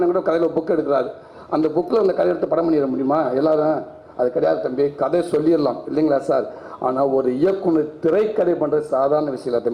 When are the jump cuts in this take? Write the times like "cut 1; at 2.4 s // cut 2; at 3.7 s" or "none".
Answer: none